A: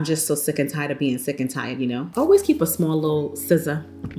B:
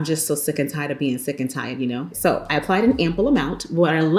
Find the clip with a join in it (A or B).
A